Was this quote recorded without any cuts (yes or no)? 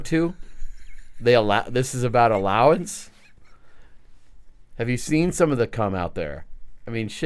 yes